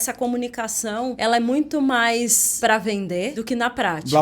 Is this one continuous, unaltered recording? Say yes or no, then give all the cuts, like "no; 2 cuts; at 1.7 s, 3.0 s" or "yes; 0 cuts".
no; 3 cuts; at 1.2 s, 2.4 s, 3.3 s